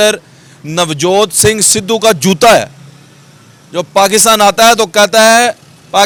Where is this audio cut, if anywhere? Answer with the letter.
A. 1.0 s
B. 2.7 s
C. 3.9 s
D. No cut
D